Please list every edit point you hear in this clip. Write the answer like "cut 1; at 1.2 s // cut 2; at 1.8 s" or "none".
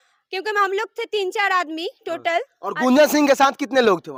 none